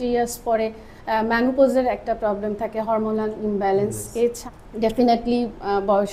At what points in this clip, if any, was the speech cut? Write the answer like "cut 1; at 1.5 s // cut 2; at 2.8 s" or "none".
cut 1; at 4.4 s